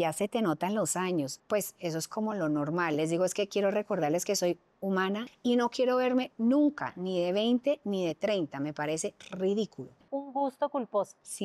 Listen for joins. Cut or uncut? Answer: cut